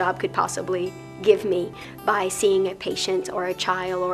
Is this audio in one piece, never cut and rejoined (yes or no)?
yes